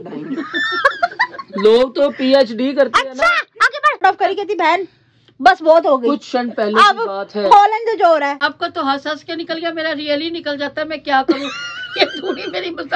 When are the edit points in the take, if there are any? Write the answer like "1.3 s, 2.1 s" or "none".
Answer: 4.0 s, 8.4 s, 11.8 s